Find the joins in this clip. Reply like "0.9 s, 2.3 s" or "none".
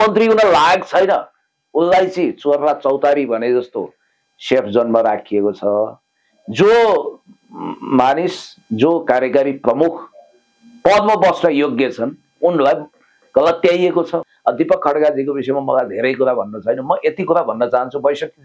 14.2 s